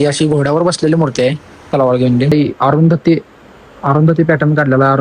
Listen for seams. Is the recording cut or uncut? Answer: cut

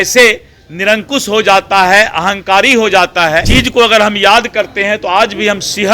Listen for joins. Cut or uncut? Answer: cut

